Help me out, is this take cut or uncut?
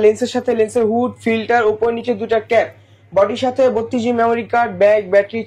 uncut